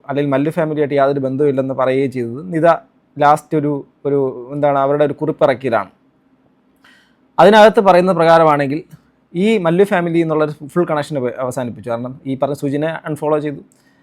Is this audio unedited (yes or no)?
yes